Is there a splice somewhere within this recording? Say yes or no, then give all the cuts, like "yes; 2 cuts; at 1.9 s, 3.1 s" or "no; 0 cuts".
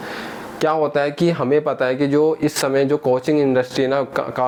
no; 0 cuts